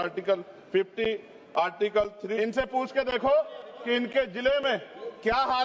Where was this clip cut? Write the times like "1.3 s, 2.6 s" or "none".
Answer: 2.3 s